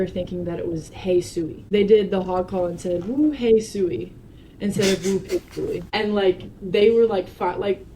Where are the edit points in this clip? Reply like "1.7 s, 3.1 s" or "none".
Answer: 1.6 s, 5.8 s